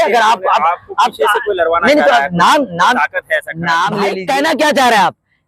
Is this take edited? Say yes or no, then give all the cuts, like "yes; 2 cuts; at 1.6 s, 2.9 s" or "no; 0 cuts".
yes; 1 cut; at 4.2 s